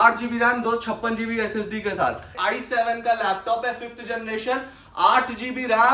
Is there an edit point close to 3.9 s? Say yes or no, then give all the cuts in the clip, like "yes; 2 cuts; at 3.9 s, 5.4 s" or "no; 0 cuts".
no; 1 cut; at 2.4 s